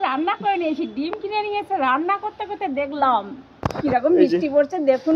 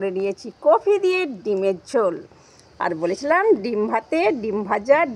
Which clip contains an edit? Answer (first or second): first